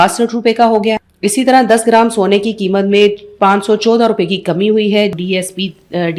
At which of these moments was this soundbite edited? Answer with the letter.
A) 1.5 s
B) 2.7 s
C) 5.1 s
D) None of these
C